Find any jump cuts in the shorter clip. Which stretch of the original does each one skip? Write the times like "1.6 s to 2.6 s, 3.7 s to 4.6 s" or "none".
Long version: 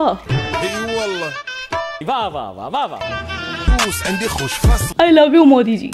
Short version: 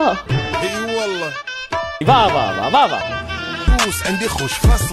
none